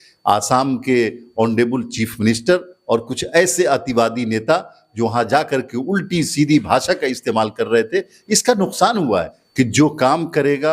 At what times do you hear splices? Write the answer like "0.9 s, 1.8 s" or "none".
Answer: 9.4 s

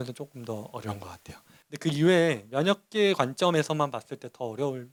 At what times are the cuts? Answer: none

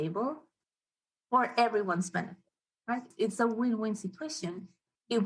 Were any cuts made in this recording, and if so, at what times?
3.1 s

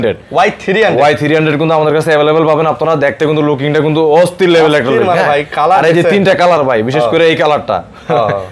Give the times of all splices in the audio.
none

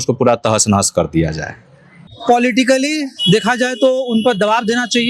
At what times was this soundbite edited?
2.0 s

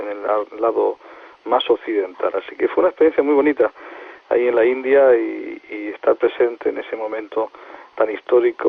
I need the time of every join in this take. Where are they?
none

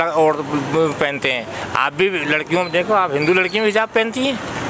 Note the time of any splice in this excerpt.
none

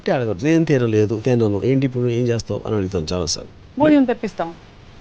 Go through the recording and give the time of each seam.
none

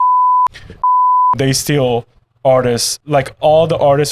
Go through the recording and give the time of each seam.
2.9 s

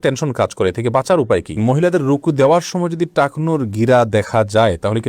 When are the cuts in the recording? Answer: 1.6 s

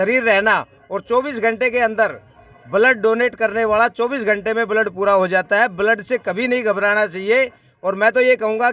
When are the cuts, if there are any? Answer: none

